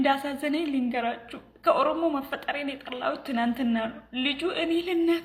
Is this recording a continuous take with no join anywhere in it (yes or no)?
yes